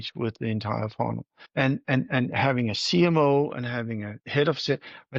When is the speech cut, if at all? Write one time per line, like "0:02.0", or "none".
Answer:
0:01.3

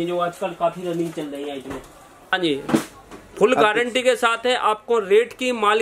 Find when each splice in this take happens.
0:02.3

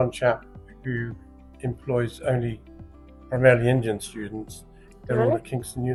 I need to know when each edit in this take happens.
none

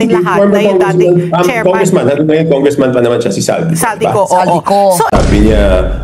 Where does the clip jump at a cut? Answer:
0:05.1

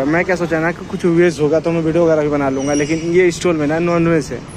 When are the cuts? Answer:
none

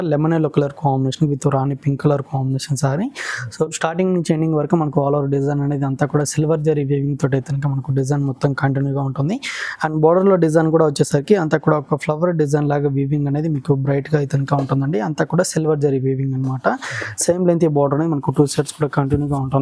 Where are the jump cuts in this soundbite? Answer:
none

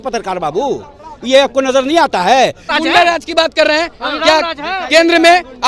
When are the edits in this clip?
0:02.7

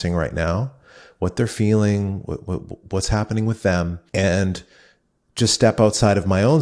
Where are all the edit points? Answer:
0:04.0

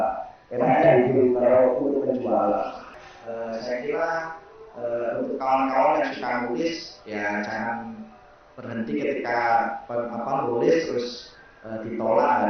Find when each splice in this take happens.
0:02.9

